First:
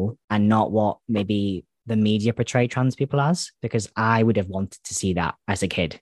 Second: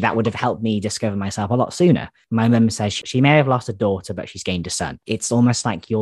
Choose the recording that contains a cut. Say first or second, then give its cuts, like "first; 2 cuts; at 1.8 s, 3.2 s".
second; 2 cuts; at 2.2 s, 5.0 s